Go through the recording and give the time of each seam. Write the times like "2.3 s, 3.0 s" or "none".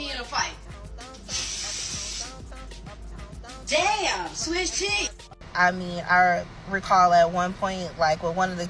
5.3 s